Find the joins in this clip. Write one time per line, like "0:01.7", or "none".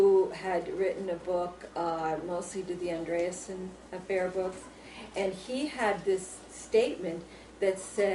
0:01.9